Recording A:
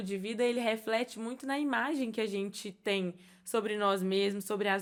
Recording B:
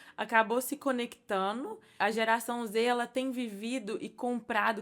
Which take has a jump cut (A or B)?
B